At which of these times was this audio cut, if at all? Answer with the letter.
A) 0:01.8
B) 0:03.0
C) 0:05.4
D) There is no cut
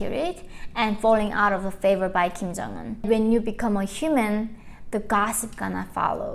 B